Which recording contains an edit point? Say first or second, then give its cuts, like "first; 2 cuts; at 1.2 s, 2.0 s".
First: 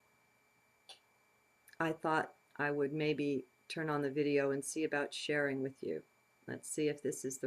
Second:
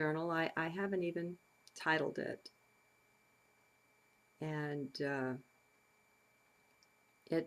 first; 1 cut; at 4.1 s